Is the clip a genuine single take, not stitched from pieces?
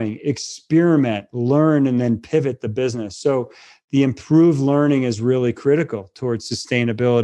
yes; 0 cuts

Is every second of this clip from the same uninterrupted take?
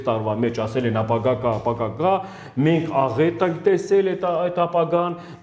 yes; 0 cuts

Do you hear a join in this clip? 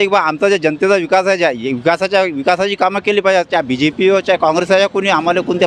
no; 0 cuts

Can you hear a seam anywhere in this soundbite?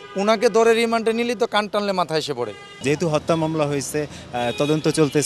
yes; 1 cut; at 2.7 s

